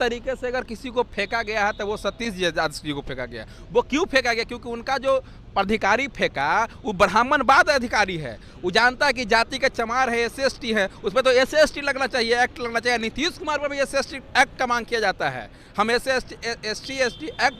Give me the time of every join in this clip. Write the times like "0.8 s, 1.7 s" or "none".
none